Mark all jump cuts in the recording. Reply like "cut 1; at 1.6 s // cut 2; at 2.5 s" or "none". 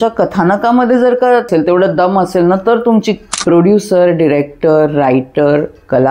cut 1; at 1.5 s // cut 2; at 3.2 s